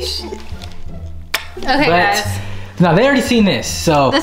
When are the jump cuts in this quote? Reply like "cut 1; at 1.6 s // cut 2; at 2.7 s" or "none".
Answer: none